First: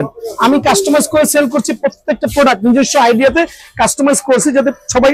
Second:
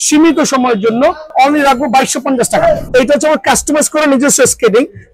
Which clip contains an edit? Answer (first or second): second